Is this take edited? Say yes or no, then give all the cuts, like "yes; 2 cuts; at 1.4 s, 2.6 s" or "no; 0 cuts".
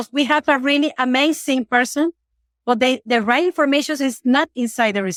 no; 0 cuts